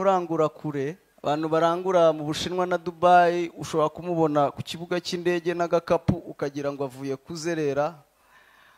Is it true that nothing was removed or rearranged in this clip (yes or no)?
no